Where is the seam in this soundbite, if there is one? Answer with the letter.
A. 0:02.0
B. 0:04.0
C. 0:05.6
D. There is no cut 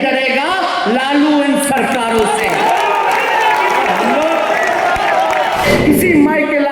C